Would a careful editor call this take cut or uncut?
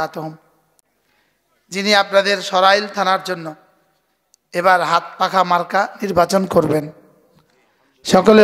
uncut